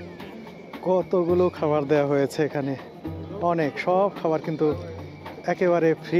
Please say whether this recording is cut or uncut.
uncut